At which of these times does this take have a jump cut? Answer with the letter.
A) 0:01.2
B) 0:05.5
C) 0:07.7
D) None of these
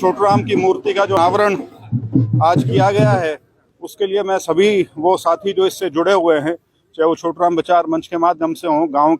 A